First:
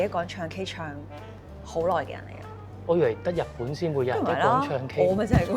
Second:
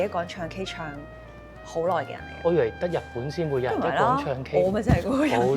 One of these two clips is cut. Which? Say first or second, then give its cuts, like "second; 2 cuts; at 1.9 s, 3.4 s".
second; 1 cut; at 2.2 s